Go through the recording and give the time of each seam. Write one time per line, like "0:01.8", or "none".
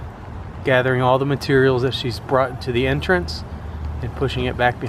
none